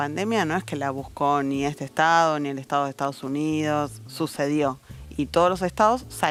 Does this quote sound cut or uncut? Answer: uncut